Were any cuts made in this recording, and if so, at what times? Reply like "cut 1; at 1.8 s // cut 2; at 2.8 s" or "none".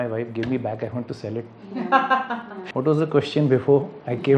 cut 1; at 2.5 s